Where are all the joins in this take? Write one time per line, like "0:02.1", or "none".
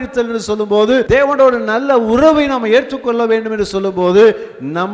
0:01.0